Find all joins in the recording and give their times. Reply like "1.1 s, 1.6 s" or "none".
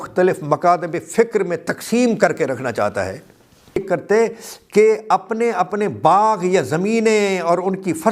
3.8 s